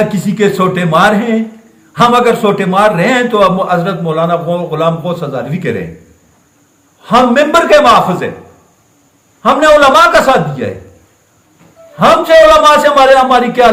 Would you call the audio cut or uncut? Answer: uncut